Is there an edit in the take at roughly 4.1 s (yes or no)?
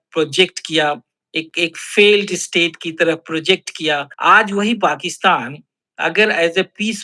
yes